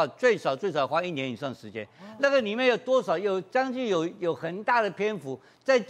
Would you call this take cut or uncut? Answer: uncut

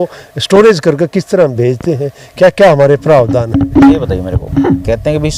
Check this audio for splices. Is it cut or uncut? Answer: uncut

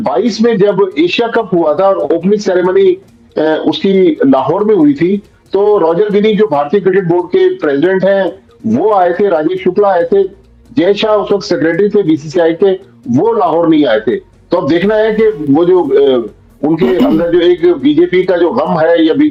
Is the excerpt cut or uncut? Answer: uncut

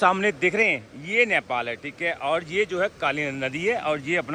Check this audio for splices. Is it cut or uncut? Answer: uncut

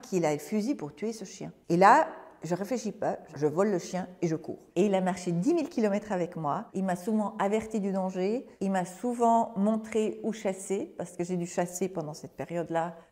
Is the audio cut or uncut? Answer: cut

